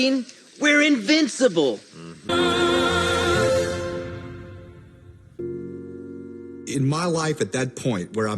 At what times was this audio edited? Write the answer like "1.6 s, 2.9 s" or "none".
2.1 s, 5.4 s